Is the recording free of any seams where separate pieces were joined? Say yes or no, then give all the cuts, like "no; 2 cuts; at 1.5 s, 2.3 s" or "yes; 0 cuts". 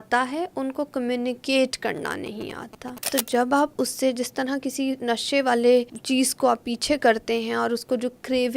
no; 2 cuts; at 3.1 s, 6.0 s